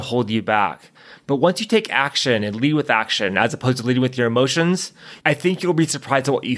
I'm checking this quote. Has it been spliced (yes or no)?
no